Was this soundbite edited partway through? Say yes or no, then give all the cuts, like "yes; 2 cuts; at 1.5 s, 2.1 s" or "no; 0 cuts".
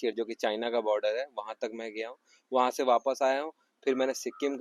no; 0 cuts